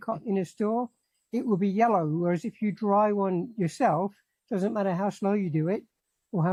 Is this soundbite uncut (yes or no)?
yes